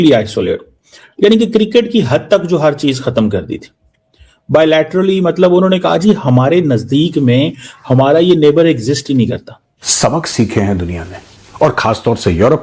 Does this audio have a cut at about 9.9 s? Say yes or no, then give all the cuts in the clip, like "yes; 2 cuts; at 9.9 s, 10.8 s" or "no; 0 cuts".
yes; 1 cut; at 9.9 s